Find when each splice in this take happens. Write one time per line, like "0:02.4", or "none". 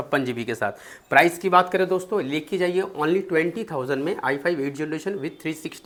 none